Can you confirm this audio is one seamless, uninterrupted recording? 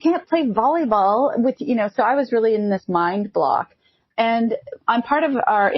yes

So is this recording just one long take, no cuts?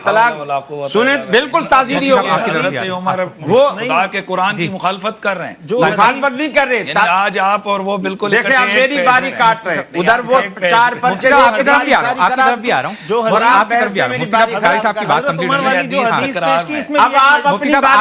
yes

